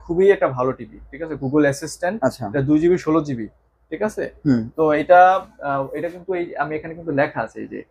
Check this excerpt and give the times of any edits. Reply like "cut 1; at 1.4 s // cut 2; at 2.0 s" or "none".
none